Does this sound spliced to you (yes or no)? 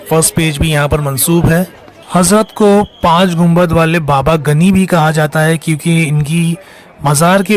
yes